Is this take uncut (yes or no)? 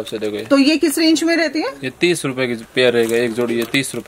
yes